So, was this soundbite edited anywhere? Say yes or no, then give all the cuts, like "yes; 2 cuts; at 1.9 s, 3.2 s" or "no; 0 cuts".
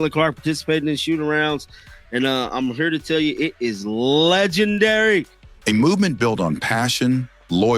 no; 0 cuts